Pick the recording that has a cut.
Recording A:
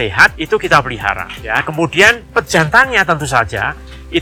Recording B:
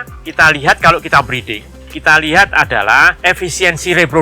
B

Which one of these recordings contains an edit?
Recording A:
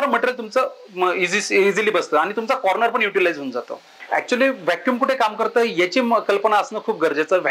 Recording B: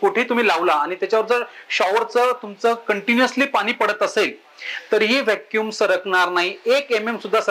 A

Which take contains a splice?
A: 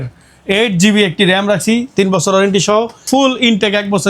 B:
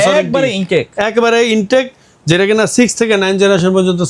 A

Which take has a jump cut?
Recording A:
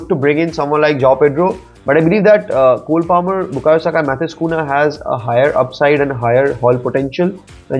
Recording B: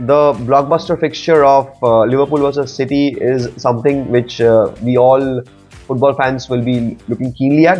A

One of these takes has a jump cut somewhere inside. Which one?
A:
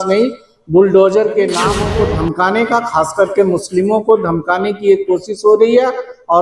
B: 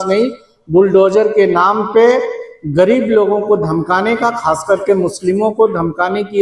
A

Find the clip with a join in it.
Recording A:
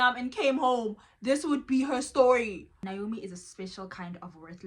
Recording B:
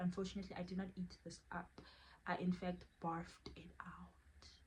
A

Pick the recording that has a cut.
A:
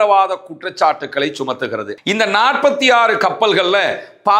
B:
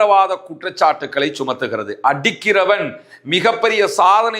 A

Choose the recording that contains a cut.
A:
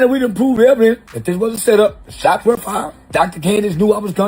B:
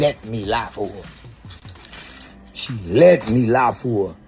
A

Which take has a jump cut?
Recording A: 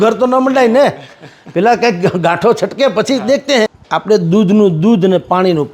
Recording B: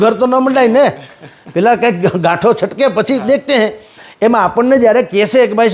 A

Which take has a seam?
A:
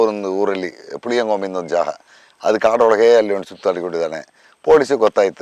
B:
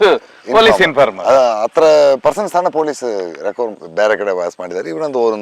B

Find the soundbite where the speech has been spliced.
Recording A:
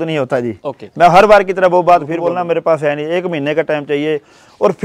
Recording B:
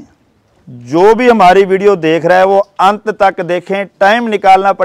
A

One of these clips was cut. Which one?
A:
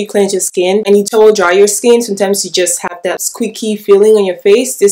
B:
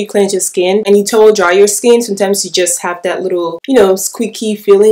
A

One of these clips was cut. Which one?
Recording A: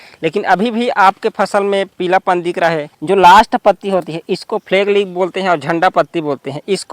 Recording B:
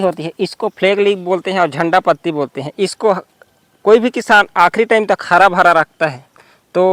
A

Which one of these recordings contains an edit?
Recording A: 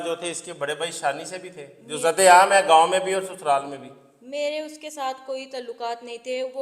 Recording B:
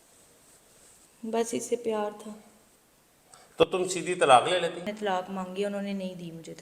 B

